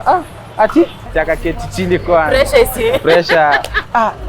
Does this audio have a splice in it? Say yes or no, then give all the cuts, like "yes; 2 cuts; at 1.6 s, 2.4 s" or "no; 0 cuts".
yes; 1 cut; at 1.0 s